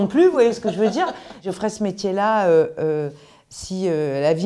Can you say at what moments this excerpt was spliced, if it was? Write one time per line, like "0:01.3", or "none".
0:01.5